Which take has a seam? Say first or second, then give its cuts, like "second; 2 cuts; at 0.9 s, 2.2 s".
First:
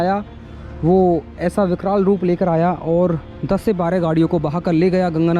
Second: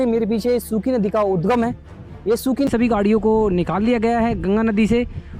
second; 1 cut; at 2.7 s